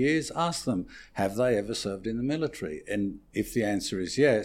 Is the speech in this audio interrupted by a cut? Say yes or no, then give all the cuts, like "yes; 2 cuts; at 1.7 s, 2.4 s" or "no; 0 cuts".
no; 0 cuts